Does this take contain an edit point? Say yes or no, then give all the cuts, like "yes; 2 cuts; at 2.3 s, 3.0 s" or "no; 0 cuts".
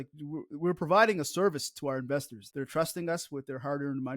yes; 1 cut; at 2.4 s